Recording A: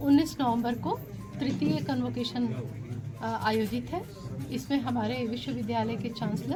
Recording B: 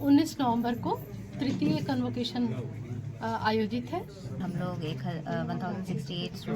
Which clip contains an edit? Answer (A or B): B